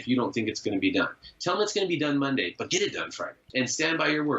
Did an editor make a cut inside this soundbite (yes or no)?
yes